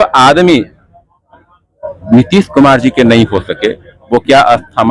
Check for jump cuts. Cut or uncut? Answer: uncut